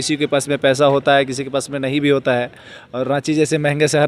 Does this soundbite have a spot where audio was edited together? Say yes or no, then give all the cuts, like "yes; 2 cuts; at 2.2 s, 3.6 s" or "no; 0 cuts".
no; 0 cuts